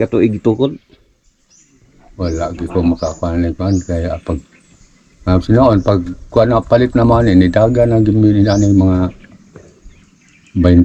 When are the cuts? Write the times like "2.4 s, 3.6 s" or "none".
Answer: none